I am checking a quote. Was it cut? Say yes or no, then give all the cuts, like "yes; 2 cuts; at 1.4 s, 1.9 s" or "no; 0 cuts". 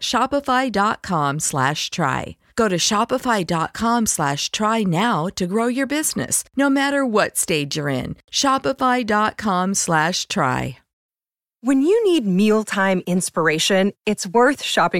yes; 1 cut; at 10.9 s